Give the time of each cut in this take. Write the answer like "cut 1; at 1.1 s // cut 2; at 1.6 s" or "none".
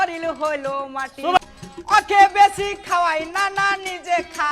cut 1; at 1.4 s